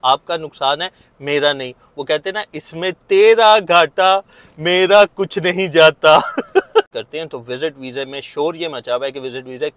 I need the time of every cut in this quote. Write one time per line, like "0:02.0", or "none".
0:06.9

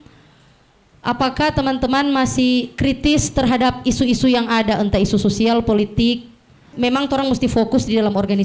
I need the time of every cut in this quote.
0:06.7

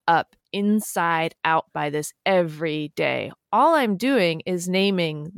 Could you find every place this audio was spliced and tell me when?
none

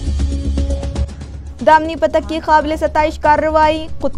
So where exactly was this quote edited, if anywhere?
0:01.0

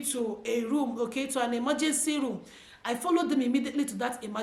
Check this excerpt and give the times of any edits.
none

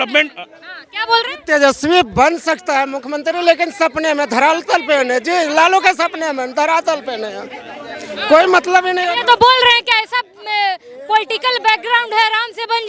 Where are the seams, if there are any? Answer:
none

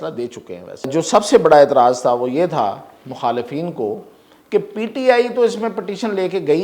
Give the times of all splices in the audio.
0:00.9

